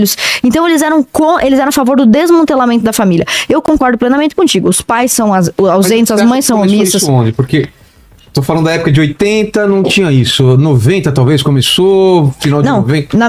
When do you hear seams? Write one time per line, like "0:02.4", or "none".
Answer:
none